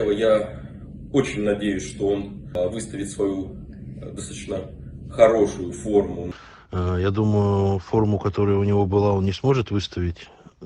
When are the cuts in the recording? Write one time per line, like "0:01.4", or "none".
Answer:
0:02.6
0:06.2